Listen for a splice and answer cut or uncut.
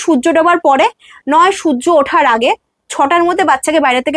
uncut